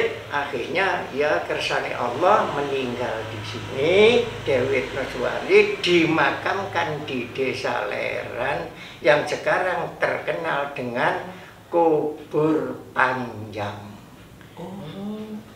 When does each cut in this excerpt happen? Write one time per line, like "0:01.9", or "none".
none